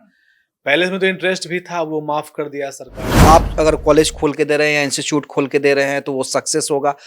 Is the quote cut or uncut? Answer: cut